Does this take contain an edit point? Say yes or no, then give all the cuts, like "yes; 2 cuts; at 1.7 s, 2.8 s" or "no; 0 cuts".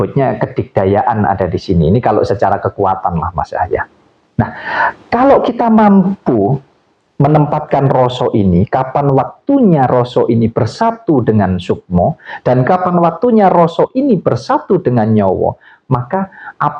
no; 0 cuts